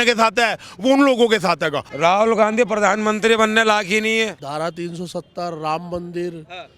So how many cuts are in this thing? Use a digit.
2